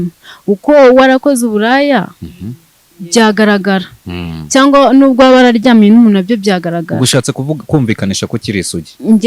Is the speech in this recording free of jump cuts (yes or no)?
yes